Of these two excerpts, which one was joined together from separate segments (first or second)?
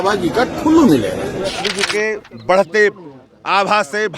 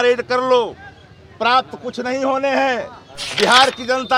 first